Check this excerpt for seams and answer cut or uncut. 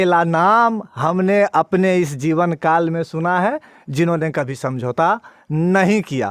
uncut